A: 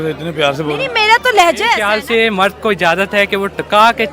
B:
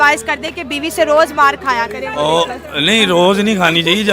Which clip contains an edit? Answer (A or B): A